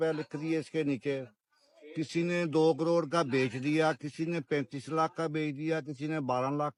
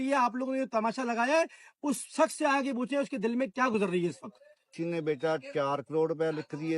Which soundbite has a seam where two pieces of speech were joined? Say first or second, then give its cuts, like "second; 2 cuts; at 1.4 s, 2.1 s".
second; 1 cut; at 4.7 s